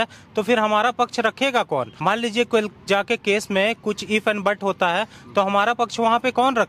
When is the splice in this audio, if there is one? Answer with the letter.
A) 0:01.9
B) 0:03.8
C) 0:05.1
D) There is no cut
A